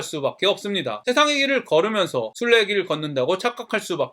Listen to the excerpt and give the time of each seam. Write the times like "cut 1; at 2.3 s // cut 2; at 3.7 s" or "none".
cut 1; at 1.0 s